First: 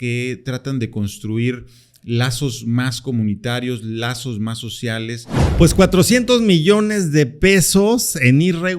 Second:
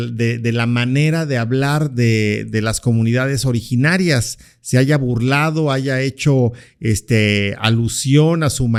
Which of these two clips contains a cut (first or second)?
first